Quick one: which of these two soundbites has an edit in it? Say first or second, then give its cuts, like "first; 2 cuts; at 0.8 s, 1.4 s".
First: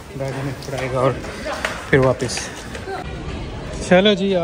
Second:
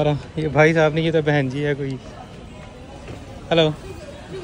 first; 1 cut; at 3.0 s